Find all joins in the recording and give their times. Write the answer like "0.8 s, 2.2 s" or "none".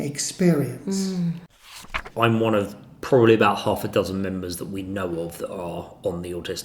2.0 s